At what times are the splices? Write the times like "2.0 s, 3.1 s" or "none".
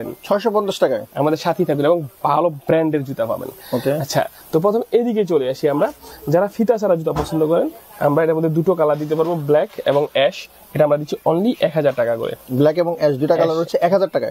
none